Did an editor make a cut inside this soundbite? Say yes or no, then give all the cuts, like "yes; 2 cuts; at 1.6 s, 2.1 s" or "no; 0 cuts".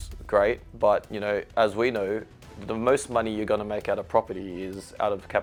no; 0 cuts